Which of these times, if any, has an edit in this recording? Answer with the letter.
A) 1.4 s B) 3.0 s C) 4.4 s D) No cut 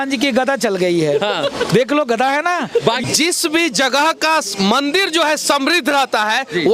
B